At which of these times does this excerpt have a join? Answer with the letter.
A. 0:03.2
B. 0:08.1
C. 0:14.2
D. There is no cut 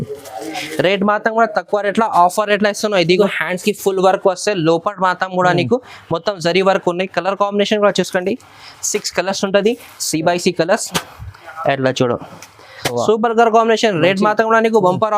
A